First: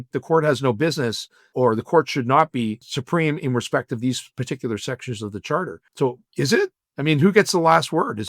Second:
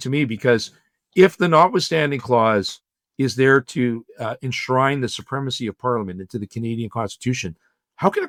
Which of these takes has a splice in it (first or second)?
first